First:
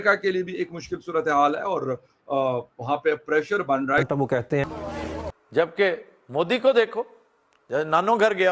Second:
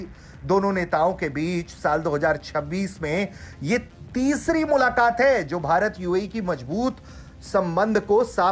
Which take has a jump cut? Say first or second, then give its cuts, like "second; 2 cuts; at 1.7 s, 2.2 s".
first; 1 cut; at 4.6 s